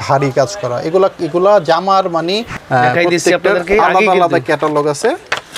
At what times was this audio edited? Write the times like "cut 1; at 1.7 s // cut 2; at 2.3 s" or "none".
cut 1; at 2.6 s